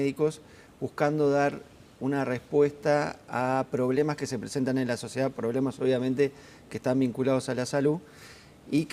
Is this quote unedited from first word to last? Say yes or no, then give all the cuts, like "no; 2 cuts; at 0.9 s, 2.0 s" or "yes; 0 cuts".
no; 1 cut; at 2.5 s